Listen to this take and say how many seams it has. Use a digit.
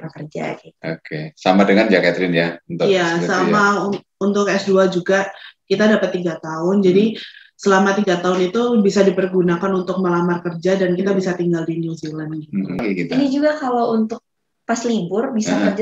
1